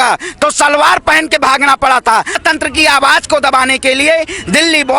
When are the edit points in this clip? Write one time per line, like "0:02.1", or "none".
0:02.4